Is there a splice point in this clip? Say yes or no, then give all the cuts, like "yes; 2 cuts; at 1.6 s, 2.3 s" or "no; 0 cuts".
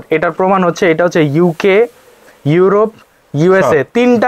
no; 0 cuts